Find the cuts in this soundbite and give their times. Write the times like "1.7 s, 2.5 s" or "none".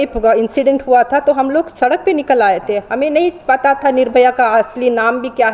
none